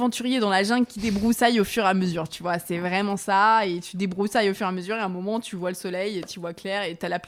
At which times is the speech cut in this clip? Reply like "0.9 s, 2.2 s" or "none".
none